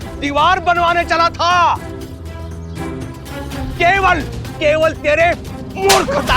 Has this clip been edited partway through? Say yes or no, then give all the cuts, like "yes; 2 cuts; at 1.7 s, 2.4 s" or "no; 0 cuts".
yes; 1 cut; at 3.7 s